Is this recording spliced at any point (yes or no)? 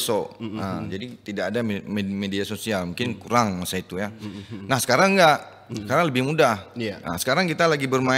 no